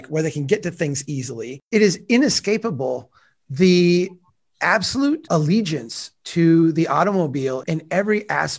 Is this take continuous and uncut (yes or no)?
no